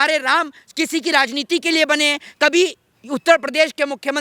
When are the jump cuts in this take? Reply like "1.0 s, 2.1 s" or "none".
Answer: none

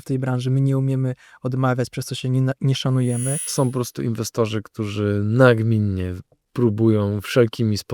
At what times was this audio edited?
3.4 s

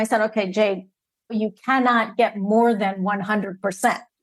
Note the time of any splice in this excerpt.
1.4 s

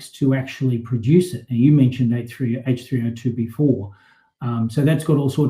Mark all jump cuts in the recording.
none

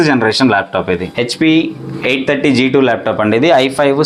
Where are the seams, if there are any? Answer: 1.1 s

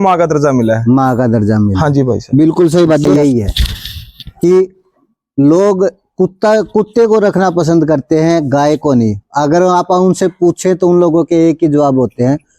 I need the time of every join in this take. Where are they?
3.0 s

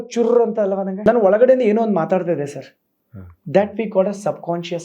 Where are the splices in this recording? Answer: 0.9 s

